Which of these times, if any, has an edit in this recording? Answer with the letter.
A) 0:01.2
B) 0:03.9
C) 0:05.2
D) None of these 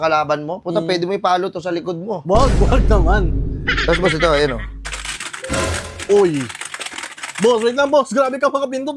D